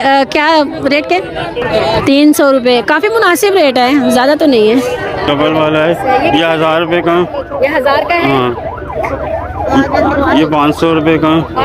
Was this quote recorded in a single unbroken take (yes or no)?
no